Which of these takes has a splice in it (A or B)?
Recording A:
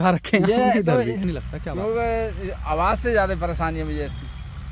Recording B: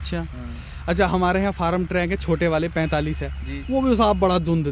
A